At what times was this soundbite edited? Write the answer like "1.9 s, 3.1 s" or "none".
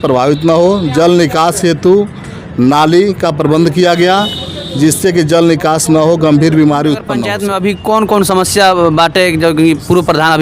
7.4 s

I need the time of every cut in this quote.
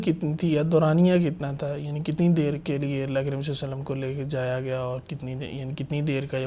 none

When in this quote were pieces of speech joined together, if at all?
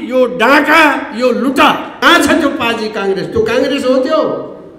1.9 s

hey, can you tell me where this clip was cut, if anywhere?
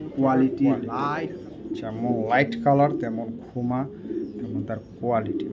1.0 s

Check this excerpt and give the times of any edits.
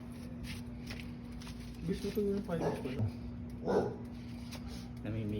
3.0 s

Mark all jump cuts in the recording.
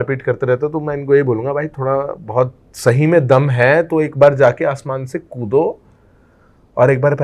none

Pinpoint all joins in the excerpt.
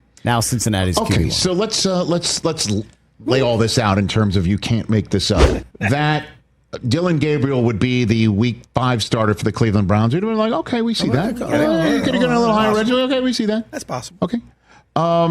5.6 s

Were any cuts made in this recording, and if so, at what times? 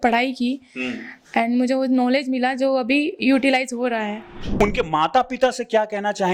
4.6 s

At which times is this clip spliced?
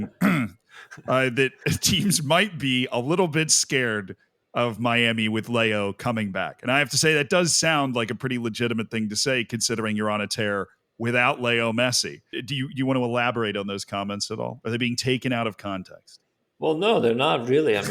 12.4 s

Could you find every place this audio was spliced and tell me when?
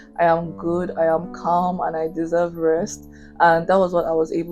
none

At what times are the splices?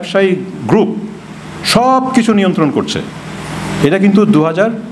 none

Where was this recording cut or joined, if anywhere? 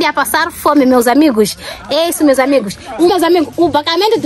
3.1 s

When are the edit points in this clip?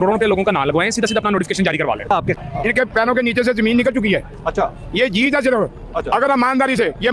2.5 s

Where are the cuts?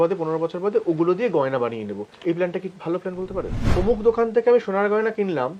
3.6 s

